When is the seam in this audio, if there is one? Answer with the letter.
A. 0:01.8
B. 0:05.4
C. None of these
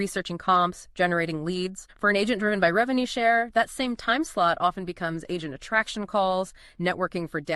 A